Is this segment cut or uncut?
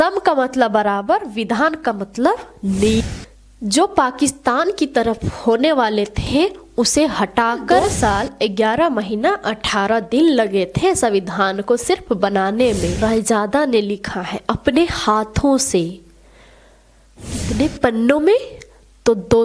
cut